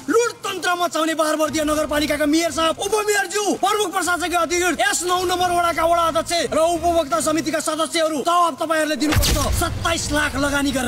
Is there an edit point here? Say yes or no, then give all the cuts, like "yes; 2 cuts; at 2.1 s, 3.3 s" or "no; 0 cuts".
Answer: yes; 1 cut; at 9.5 s